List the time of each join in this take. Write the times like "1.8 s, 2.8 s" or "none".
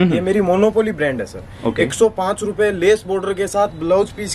none